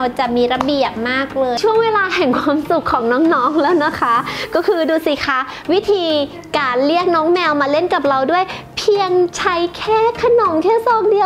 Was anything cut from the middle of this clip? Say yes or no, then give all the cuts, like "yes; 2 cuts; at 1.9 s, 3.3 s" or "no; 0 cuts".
yes; 1 cut; at 1.6 s